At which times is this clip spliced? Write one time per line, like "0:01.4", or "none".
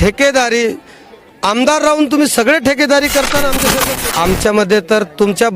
0:03.7